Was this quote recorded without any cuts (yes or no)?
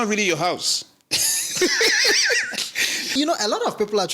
no